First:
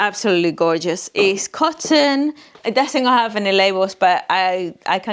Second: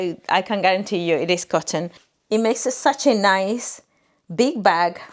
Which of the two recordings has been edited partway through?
second; 1 cut; at 2.0 s

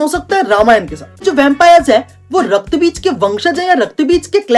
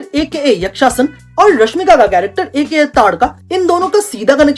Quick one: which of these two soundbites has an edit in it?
first; 1 cut; at 1.2 s

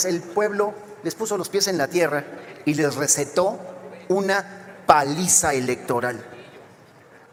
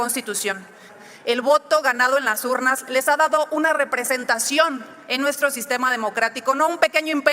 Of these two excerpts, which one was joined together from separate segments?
second; 1 cut; at 0.9 s

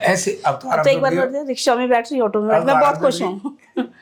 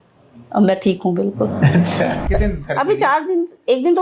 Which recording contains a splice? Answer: second; 1 cut; at 2.2 s

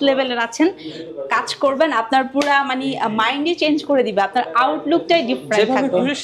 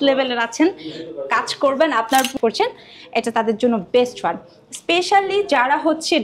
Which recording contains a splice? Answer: second; 1 cut; at 2.3 s

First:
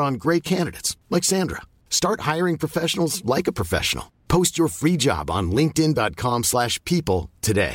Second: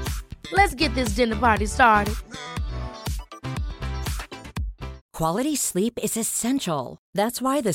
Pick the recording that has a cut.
second; 1 cut; at 5.0 s

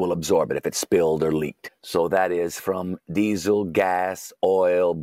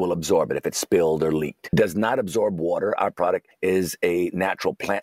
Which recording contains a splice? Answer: second; 1 cut; at 1.6 s

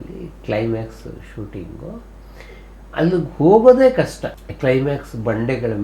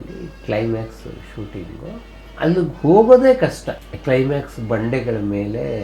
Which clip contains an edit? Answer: second; 1 cut; at 2.2 s

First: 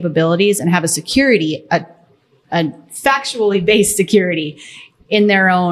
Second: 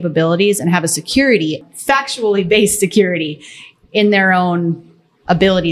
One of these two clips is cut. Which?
second; 1 cut; at 1.6 s

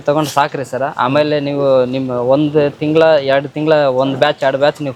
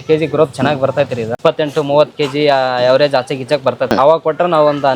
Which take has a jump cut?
second; 2 cuts; at 1.3 s, 3.9 s

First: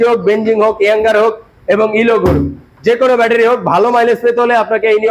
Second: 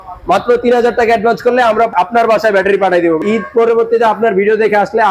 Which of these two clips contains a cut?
second; 2 cuts; at 1.9 s, 3.2 s

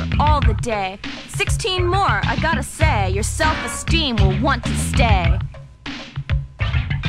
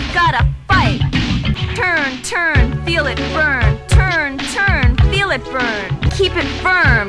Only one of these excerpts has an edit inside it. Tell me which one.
second; 2 cuts; at 1.6 s, 6.1 s

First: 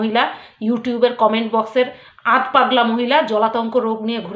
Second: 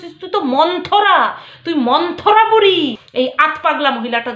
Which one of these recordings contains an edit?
second; 1 cut; at 3.0 s

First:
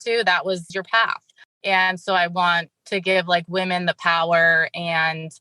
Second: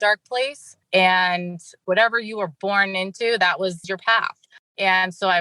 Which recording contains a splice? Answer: second; 1 cut; at 1.8 s

